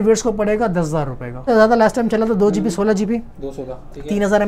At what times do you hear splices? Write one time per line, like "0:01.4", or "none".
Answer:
0:01.3